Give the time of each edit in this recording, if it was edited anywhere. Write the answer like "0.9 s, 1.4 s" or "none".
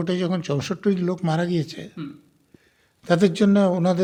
none